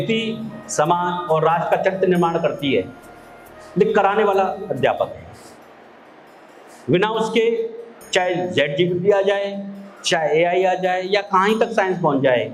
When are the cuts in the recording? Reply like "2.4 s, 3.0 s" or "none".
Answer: none